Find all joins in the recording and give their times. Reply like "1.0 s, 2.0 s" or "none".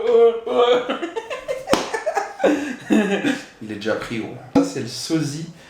4.5 s